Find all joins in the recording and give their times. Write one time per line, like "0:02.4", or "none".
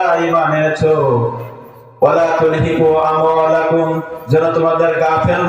0:01.4